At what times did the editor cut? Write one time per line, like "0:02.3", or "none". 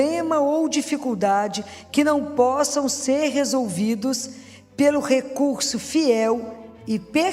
none